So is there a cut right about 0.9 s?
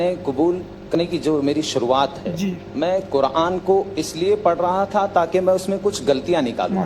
yes; 1 cut; at 0.9 s

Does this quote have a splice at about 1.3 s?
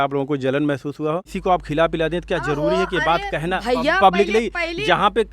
yes; 1 cut; at 1.3 s

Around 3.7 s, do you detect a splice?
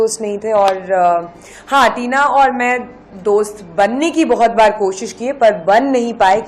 no; 0 cuts

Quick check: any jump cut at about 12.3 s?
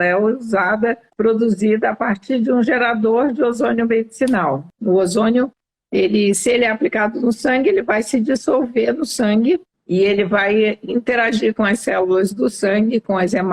no; 3 cuts; at 1.1 s, 4.7 s, 9.7 s

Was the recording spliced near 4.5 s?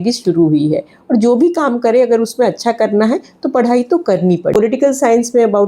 yes; 1 cut; at 4.5 s

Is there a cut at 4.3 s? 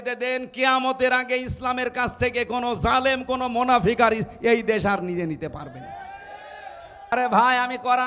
no; 1 cut; at 7.1 s

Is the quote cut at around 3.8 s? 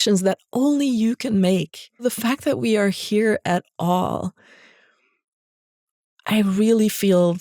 no; 1 cut; at 2.0 s

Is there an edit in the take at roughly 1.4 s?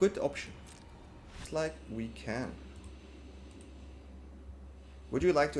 yes; 1 cut; at 1.4 s

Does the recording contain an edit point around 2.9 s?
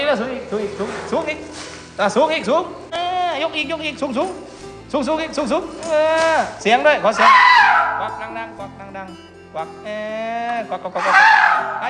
yes; 1 cut; at 2.9 s

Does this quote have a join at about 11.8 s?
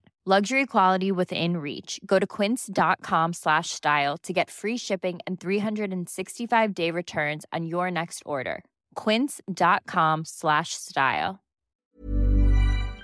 yes; 1 cut; at 11.8 s

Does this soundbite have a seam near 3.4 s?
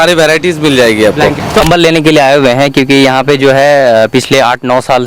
no; 1 cut; at 1.6 s

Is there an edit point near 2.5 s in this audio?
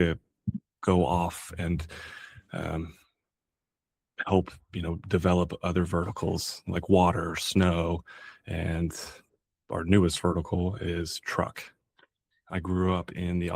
no; 1 cut; at 12.4 s

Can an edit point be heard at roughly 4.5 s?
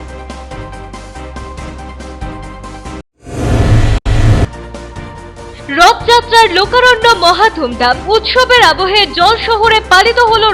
no; 1 cut; at 1.1 s

